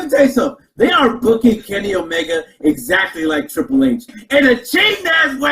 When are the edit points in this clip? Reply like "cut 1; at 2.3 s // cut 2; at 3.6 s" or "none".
cut 1; at 4.2 s